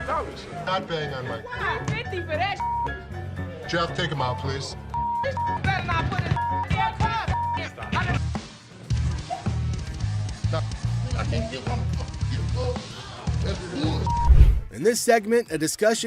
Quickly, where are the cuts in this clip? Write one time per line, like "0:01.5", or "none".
0:08.2